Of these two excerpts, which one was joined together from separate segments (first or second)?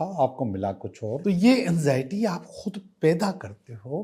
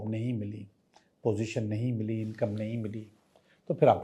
first